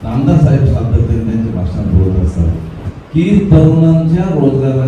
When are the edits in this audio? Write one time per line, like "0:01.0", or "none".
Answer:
0:02.8